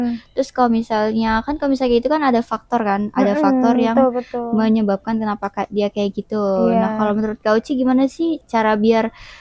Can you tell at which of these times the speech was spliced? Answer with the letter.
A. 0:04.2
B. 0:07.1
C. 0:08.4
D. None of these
C